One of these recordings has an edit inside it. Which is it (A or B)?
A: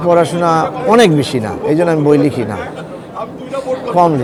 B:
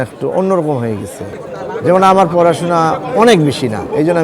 B